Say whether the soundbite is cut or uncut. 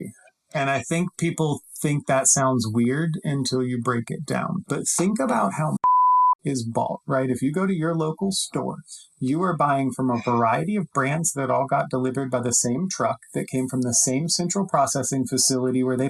cut